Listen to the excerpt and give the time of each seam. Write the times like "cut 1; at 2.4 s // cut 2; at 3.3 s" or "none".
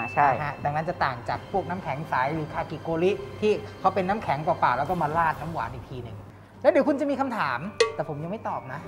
cut 1; at 6.2 s // cut 2; at 7.8 s